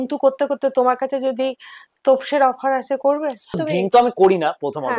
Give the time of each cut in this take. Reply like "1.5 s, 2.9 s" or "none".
3.6 s